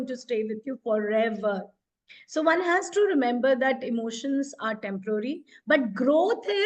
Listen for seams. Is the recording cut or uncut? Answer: uncut